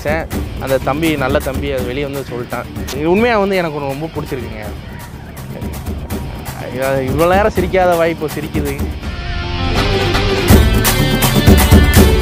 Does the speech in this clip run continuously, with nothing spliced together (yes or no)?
no